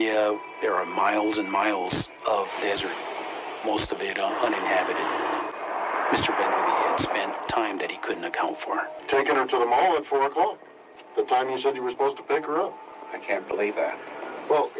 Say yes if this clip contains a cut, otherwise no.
no